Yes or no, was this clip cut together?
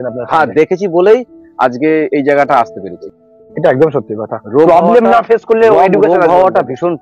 yes